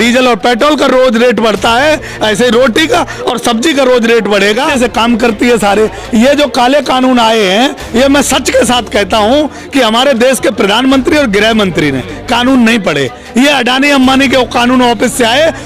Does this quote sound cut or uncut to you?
cut